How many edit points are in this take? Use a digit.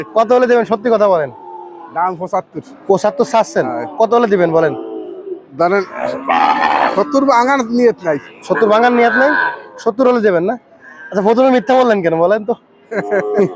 0